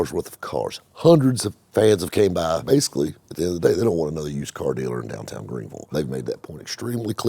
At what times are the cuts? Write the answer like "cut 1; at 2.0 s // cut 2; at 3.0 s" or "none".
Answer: cut 1; at 2.6 s // cut 2; at 5.9 s